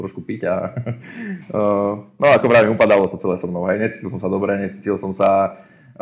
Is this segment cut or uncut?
uncut